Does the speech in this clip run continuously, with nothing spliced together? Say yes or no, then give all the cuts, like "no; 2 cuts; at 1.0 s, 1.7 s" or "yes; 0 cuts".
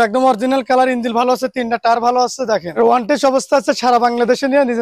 no; 1 cut; at 2.7 s